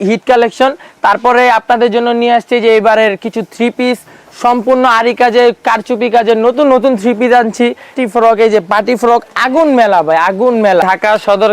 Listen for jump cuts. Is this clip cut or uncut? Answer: cut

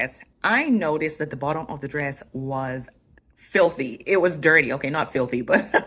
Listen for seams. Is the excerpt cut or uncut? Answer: uncut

